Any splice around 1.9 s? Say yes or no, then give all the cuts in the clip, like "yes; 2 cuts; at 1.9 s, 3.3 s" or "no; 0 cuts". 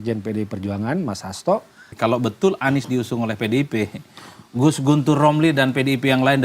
yes; 1 cut; at 1.9 s